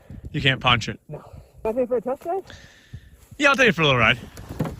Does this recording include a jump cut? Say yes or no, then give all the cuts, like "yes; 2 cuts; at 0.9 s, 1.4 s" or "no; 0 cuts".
yes; 1 cut; at 1.6 s